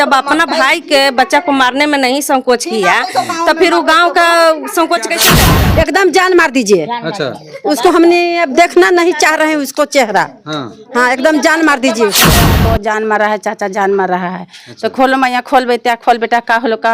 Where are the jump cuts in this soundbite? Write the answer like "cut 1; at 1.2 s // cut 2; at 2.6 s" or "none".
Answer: cut 1; at 5.4 s // cut 2; at 12.5 s